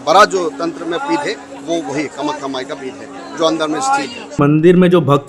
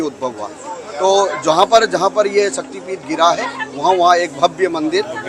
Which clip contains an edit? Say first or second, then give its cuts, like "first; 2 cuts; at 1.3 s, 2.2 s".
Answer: first; 1 cut; at 4.4 s